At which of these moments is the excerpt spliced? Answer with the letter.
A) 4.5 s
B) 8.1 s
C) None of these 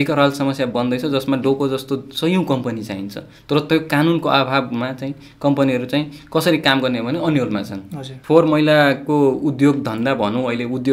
B